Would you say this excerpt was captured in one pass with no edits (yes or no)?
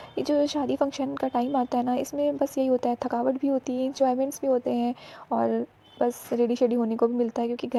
yes